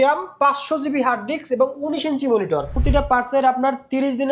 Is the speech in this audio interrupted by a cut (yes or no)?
yes